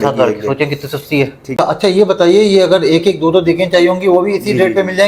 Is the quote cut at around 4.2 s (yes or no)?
no